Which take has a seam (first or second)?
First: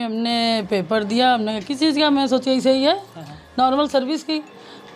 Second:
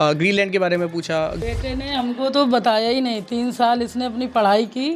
second